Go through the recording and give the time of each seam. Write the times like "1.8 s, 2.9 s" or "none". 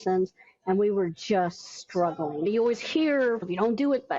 2.5 s, 3.4 s